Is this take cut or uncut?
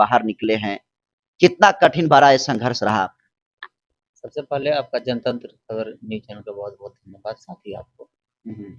uncut